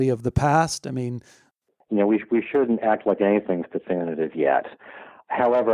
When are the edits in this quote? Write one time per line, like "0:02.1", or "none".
0:01.4